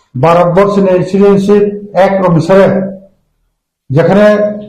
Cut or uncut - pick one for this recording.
cut